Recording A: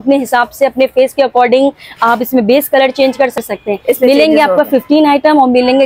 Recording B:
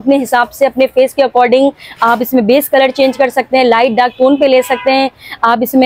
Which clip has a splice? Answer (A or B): A